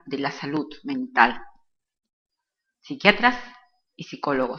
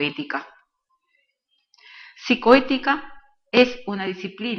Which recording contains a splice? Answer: second; 1 cut; at 1.3 s

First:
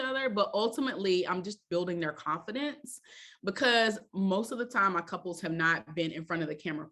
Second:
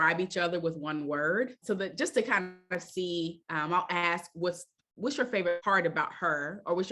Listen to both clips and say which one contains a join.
second; 2 cuts; at 1.6 s, 5.6 s

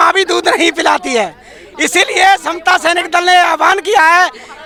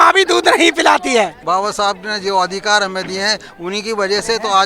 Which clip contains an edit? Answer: second; 1 cut; at 1.4 s

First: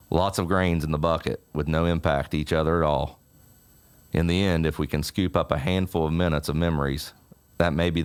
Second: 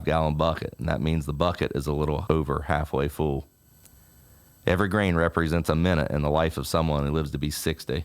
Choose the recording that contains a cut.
second; 1 cut; at 2.2 s

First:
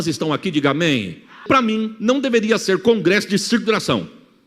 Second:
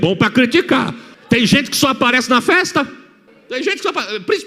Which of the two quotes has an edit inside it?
first; 1 cut; at 1.4 s

